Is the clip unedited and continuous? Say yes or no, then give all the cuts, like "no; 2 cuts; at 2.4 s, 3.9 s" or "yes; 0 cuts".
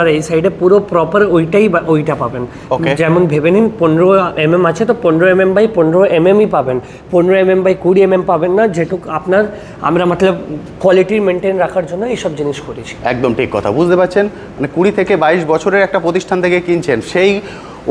yes; 0 cuts